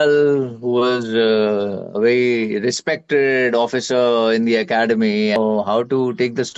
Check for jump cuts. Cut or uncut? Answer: cut